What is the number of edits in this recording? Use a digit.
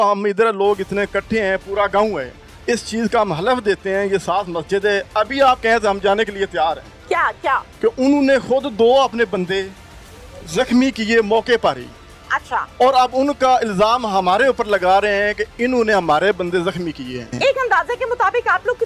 1